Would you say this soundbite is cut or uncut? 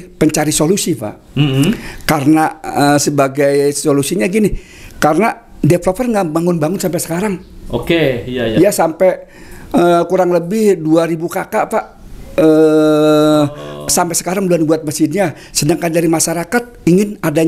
uncut